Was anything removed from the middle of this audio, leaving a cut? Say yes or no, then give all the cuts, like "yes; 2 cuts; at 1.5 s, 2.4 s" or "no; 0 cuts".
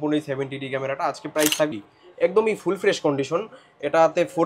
yes; 1 cut; at 1.7 s